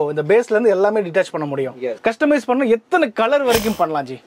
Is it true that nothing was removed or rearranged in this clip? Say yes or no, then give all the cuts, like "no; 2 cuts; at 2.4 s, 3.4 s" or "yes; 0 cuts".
no; 1 cut; at 2.0 s